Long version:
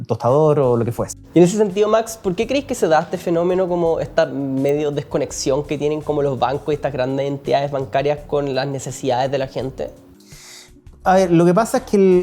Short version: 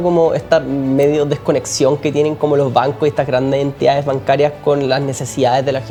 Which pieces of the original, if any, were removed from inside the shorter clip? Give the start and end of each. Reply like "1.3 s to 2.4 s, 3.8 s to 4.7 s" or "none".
none